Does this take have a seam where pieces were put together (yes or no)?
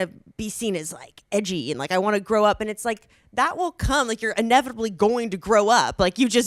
no